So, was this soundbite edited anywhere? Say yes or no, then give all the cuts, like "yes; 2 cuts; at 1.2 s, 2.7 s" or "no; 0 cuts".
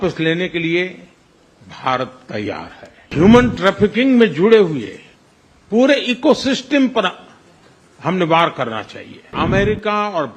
yes; 2 cuts; at 3.1 s, 9.3 s